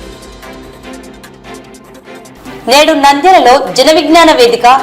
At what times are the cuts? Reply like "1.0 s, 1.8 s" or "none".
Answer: 1.5 s